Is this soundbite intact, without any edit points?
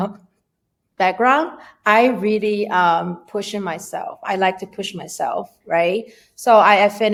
yes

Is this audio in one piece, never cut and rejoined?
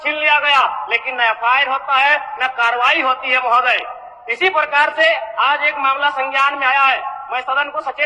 yes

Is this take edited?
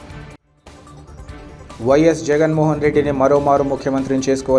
no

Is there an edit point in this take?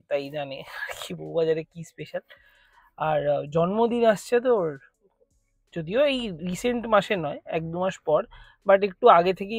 no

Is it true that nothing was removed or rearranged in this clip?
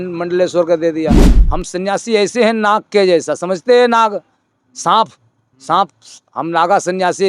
no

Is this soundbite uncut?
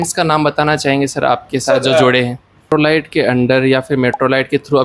no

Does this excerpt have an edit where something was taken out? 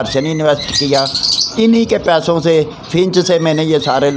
no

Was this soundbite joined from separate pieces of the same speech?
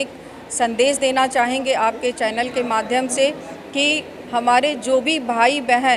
no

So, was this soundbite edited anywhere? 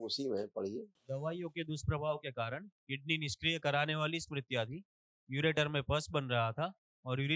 yes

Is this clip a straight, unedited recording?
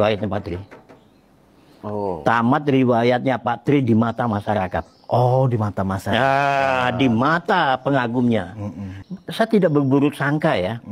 no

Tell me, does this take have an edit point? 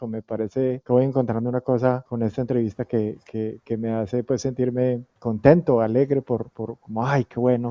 yes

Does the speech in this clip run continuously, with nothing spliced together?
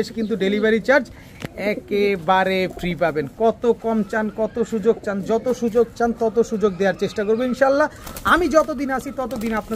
yes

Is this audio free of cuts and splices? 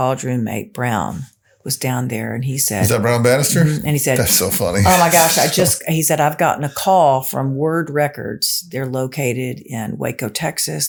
yes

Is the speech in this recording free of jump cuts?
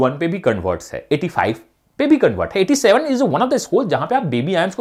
yes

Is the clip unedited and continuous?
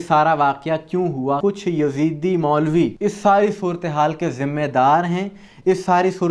no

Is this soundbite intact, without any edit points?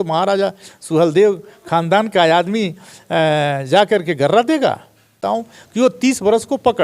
no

